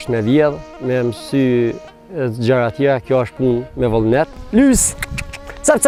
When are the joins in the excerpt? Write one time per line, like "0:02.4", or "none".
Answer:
none